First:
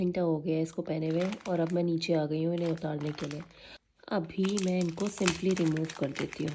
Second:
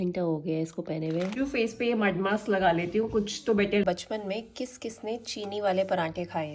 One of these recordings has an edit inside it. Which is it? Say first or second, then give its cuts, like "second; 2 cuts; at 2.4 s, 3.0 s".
second; 2 cuts; at 1.3 s, 3.8 s